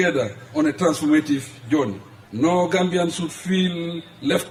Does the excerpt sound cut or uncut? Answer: uncut